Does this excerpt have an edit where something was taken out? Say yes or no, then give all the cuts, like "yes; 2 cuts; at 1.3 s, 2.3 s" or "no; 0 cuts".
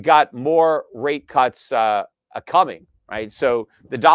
no; 0 cuts